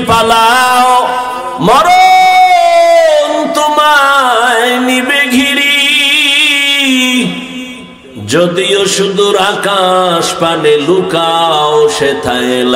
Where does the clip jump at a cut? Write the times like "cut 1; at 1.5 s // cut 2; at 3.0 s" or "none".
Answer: cut 1; at 1.4 s